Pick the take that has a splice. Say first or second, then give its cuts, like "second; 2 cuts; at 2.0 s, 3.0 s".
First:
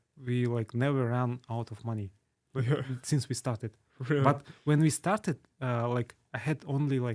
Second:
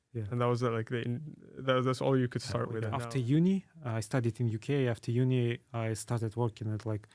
second; 1 cut; at 2.9 s